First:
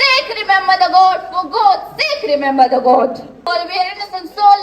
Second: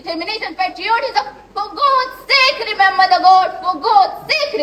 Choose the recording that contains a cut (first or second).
first